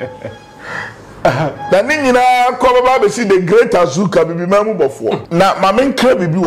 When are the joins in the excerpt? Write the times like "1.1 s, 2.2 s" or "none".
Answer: 5.2 s